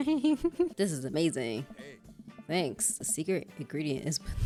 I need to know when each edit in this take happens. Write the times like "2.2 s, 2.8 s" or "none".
none